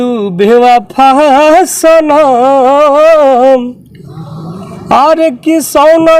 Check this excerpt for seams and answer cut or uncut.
uncut